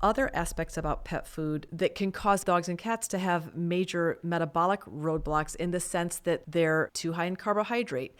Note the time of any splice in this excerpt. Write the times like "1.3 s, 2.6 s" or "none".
1.7 s, 2.4 s, 6.5 s, 7.0 s